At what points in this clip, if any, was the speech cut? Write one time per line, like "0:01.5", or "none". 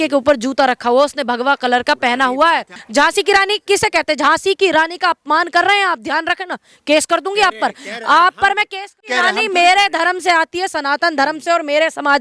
0:02.8
0:09.1